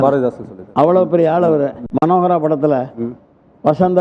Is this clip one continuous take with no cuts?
no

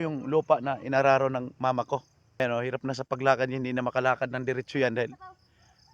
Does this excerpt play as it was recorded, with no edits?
no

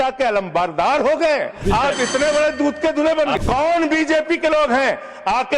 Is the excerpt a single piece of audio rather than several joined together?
no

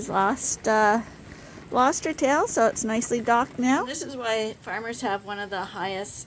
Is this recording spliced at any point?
yes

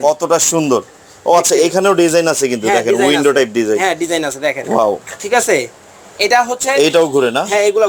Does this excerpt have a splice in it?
no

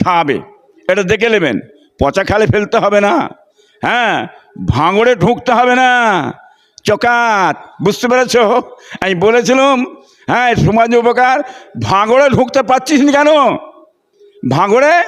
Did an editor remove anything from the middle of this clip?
no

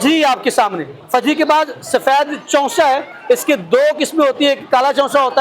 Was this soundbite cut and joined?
yes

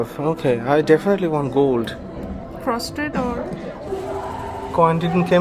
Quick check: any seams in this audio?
yes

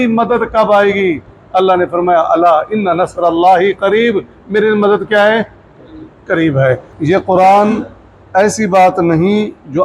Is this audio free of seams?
no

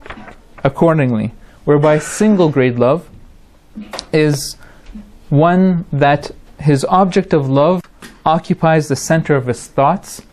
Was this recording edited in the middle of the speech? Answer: no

